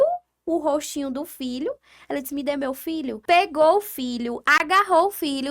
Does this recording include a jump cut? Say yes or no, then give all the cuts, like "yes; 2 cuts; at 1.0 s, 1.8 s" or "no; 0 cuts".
yes; 1 cut; at 3.1 s